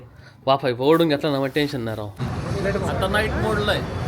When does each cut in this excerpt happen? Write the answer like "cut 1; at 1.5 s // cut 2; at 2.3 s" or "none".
cut 1; at 2.3 s